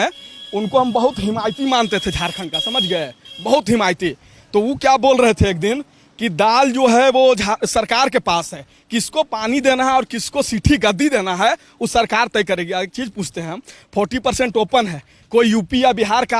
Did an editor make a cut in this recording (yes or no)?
no